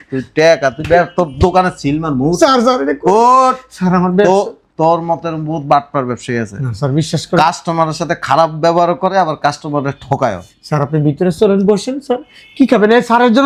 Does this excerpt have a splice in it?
no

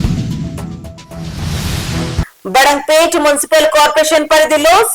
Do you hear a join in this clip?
yes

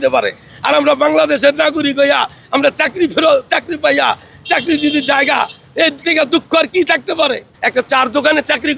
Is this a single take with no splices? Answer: no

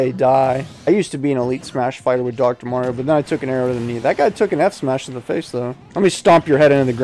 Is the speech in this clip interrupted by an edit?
yes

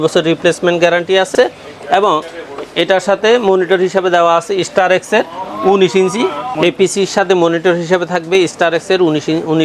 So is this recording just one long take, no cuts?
yes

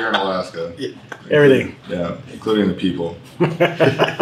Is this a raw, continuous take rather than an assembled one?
yes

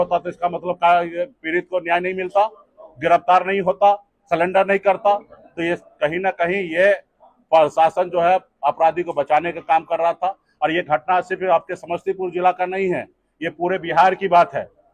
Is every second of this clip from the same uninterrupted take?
yes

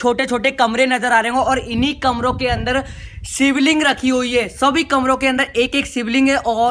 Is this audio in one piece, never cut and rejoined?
yes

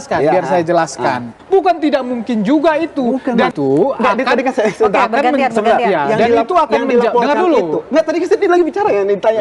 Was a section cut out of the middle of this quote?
yes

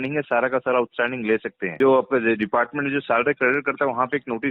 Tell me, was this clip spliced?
yes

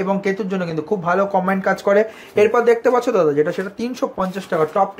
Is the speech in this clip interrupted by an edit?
no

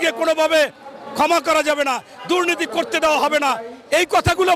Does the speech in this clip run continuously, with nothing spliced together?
yes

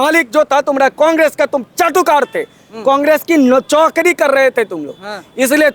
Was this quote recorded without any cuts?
yes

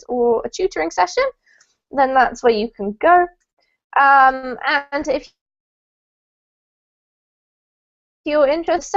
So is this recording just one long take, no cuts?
yes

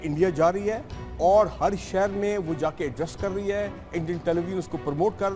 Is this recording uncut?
yes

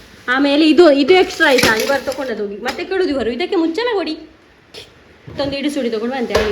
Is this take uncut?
no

